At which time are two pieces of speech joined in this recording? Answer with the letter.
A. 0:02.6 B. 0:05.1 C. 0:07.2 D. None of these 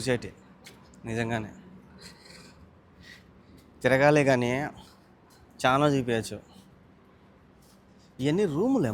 D